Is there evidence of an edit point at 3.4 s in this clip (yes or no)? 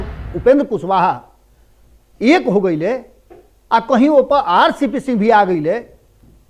no